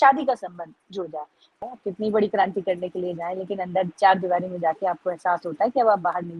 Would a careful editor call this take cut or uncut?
cut